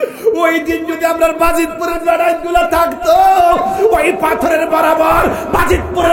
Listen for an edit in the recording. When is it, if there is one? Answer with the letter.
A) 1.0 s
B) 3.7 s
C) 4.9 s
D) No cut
D